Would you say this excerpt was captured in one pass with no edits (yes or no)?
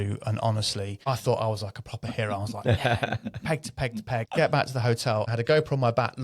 no